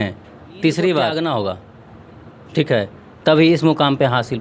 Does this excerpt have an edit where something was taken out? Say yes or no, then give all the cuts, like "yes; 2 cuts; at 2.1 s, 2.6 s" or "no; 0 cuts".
yes; 1 cut; at 1.3 s